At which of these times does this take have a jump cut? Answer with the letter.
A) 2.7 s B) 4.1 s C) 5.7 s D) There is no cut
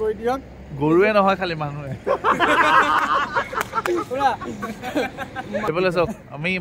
C